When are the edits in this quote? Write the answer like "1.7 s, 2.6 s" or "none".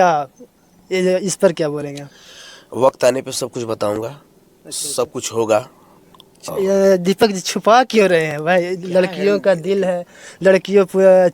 none

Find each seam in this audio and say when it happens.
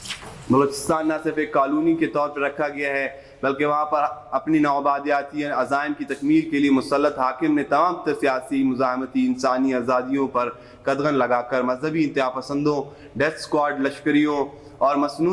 none

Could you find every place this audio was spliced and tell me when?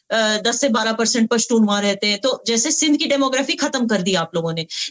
none

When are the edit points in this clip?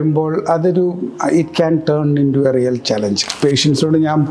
3.2 s

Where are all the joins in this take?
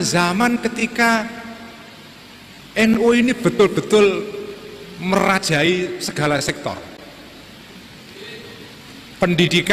none

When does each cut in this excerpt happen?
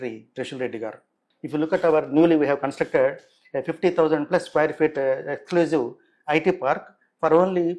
none

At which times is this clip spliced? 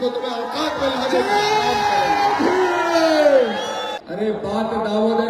4.0 s

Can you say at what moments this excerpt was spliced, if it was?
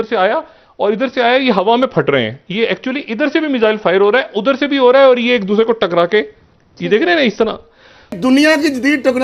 8.2 s

